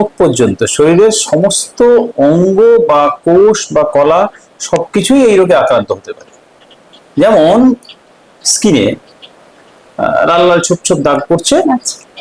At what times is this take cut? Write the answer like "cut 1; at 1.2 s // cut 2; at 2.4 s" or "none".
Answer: none